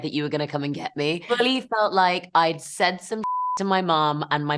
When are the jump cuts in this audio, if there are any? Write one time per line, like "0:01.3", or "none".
0:01.2